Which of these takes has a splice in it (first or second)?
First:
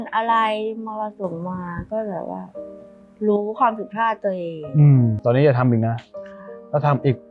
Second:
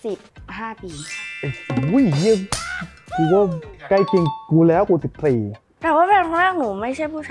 first